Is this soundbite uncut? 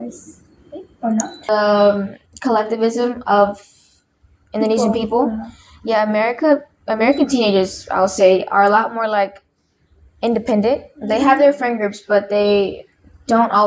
no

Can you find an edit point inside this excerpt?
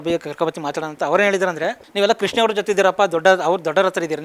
no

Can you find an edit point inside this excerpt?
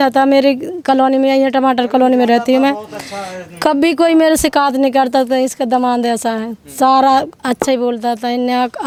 no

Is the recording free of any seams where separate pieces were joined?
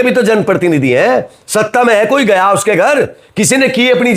yes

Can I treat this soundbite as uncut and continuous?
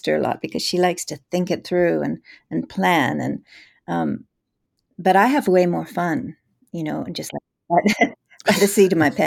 yes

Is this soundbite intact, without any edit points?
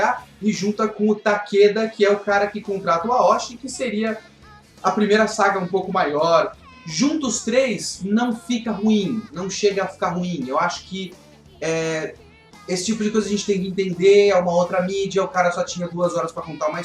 no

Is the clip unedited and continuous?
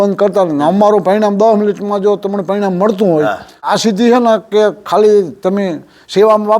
no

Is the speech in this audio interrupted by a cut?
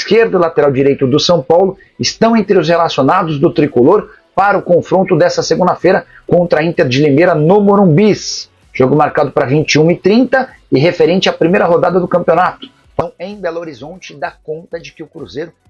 yes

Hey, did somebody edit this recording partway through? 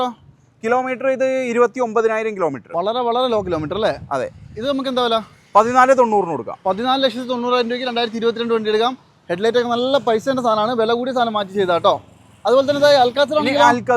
no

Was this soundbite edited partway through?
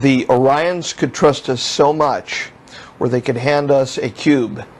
no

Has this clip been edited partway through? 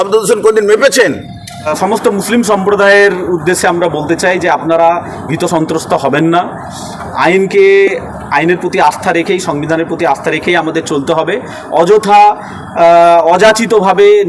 yes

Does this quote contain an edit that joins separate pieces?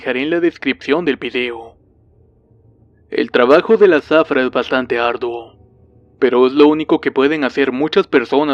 yes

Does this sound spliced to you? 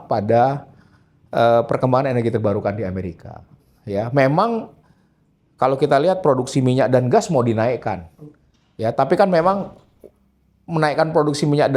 no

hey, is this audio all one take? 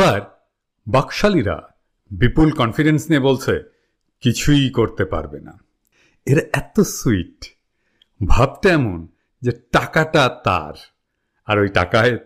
yes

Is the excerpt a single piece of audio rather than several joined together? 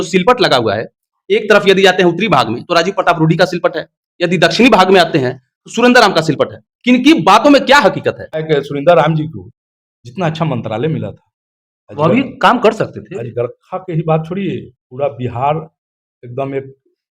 no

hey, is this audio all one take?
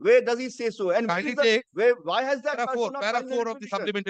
yes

